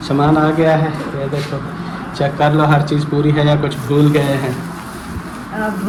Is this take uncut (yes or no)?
yes